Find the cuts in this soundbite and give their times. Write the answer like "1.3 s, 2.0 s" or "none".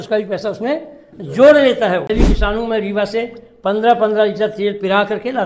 2.1 s